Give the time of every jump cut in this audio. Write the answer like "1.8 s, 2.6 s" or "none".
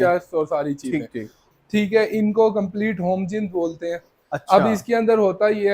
1.4 s